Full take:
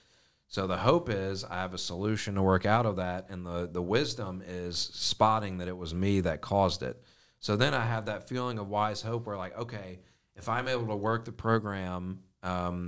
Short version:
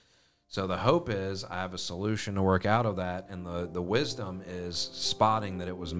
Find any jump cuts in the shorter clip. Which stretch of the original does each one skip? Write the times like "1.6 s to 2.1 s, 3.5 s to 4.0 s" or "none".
none